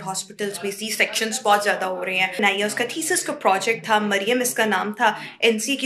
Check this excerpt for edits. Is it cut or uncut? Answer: cut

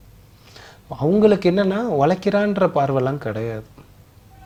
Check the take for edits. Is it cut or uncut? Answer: uncut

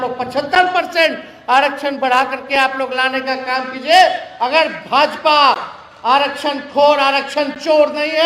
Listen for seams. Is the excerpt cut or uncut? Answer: uncut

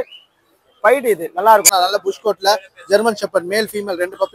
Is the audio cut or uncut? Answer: cut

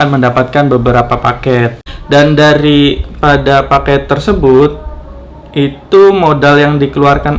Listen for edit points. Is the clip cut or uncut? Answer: cut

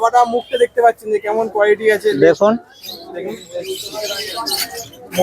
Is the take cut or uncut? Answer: uncut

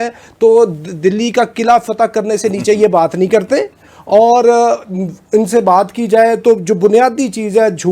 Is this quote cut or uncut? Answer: uncut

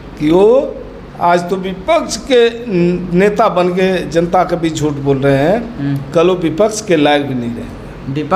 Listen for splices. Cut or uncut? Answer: uncut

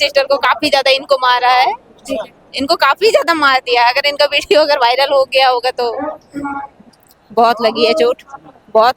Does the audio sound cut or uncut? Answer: cut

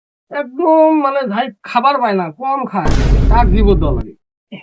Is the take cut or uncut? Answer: uncut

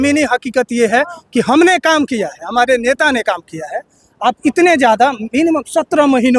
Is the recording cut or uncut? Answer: uncut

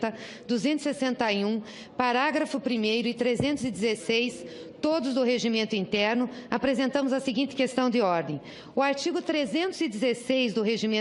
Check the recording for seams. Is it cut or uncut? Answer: uncut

